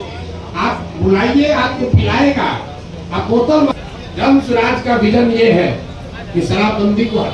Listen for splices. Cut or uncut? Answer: cut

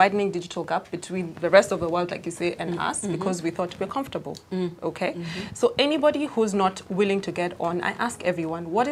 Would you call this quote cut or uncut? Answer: uncut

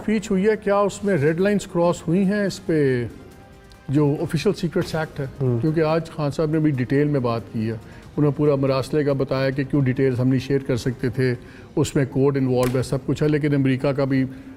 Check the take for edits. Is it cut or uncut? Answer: uncut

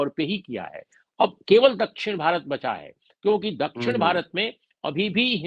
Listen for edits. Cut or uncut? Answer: uncut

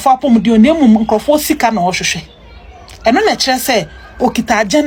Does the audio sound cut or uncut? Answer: uncut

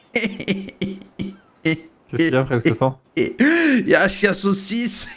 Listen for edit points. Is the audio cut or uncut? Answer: uncut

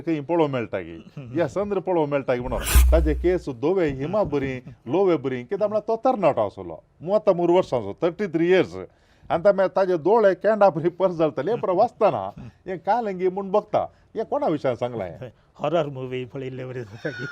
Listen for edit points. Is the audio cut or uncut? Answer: cut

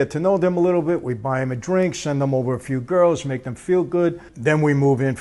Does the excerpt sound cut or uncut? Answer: uncut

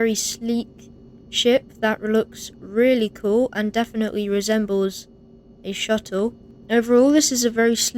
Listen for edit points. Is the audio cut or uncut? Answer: cut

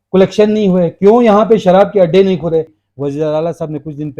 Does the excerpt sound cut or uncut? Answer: cut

